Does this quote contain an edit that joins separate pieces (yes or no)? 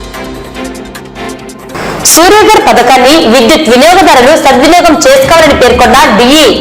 yes